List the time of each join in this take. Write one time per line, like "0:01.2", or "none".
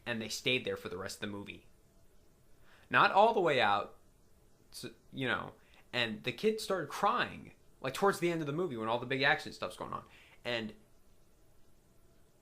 0:06.6